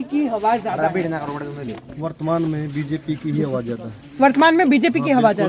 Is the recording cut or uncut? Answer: uncut